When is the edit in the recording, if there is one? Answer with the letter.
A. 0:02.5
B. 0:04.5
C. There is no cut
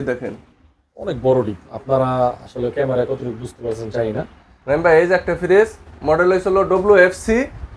B